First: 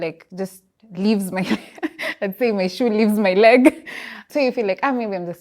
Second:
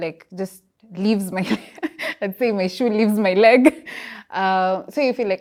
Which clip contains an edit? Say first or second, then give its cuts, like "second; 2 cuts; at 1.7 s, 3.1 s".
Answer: first; 1 cut; at 4.2 s